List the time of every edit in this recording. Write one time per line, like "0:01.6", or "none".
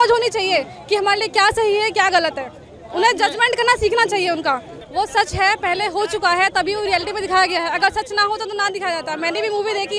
none